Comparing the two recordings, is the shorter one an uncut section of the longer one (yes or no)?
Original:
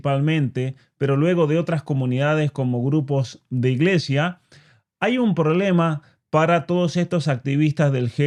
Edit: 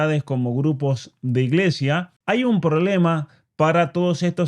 no